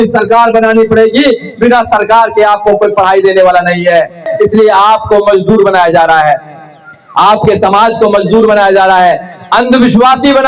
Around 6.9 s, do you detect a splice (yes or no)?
no